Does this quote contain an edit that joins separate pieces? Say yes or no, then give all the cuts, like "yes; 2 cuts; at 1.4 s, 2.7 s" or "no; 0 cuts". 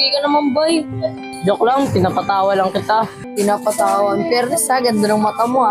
yes; 1 cut; at 3.2 s